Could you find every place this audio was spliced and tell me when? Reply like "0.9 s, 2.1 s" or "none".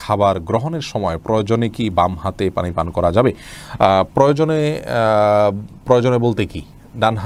none